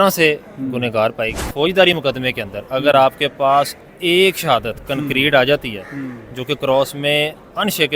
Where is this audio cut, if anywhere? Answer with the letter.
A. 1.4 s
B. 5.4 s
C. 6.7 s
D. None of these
A